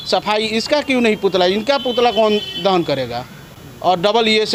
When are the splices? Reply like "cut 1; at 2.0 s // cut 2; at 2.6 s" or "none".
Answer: none

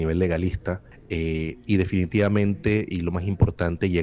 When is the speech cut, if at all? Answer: cut 1; at 0.9 s

